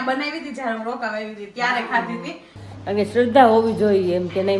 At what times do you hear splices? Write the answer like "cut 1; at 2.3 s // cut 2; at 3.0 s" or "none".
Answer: cut 1; at 2.5 s